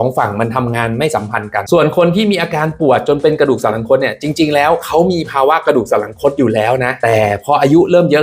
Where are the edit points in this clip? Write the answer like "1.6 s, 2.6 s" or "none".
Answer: 1.6 s